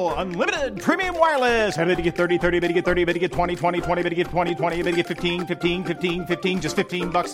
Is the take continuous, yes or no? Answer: yes